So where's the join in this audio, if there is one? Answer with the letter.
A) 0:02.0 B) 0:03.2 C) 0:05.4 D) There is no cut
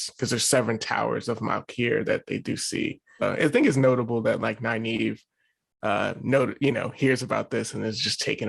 B